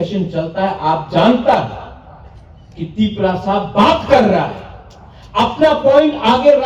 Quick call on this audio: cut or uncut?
uncut